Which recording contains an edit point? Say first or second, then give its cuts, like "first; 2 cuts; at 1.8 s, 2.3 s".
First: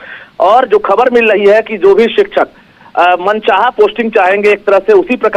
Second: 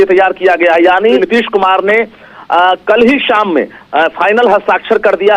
second; 1 cut; at 1.2 s